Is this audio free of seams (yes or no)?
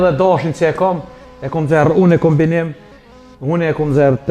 yes